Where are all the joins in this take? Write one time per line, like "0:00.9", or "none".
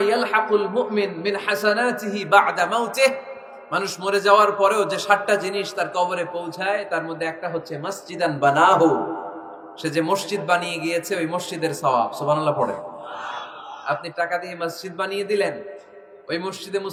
none